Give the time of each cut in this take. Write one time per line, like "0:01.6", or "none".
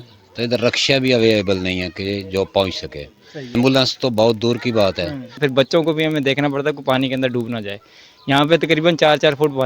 0:03.5
0:05.4